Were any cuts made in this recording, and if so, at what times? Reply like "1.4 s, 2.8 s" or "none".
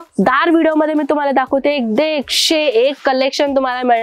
none